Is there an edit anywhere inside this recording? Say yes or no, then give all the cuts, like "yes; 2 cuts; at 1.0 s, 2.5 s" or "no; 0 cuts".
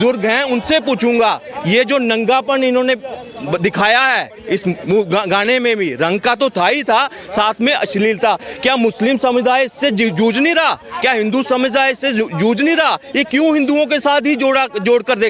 no; 0 cuts